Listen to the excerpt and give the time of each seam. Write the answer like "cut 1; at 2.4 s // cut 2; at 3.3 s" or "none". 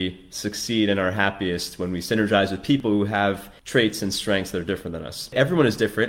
cut 1; at 3.1 s // cut 2; at 5.3 s